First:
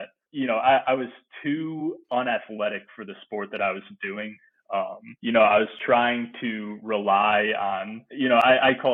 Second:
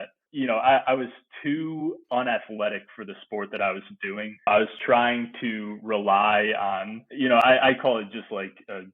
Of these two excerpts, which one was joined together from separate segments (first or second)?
second